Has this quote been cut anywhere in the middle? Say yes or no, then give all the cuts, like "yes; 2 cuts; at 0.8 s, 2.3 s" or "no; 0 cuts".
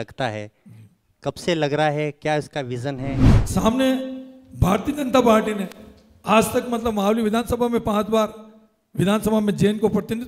yes; 1 cut; at 3.3 s